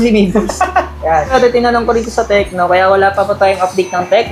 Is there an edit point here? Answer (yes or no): yes